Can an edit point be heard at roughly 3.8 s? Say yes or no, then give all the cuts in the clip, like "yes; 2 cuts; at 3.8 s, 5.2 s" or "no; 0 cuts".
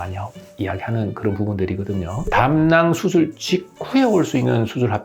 no; 1 cut; at 2.2 s